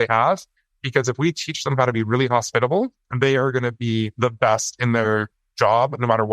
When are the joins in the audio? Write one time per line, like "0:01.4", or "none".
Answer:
0:03.0
0:04.1